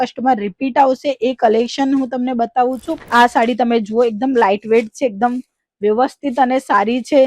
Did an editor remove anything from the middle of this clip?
yes; 1 cut; at 3.0 s

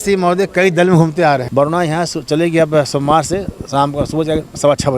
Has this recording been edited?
yes; 1 cut; at 1.5 s

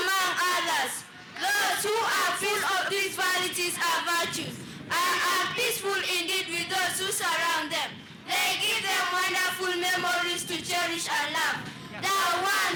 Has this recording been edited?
no; 0 cuts

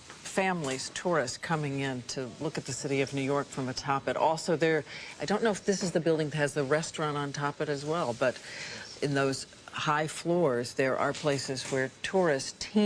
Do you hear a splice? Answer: no; 0 cuts

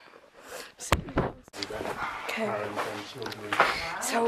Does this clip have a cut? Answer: yes; 1 cut; at 1.4 s

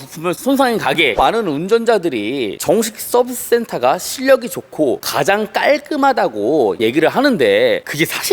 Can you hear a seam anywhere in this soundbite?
yes; 2 cuts; at 1.2 s, 6.8 s

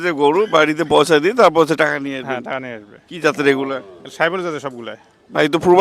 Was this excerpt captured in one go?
yes; 0 cuts

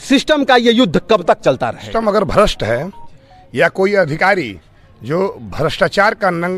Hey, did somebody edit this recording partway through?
yes; 1 cut; at 1.9 s

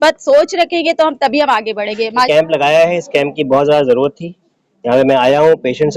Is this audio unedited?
no; 1 cut; at 2.3 s

